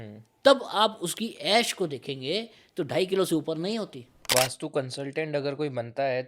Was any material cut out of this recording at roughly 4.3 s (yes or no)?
yes